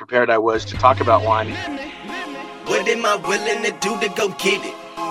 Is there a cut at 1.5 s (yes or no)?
yes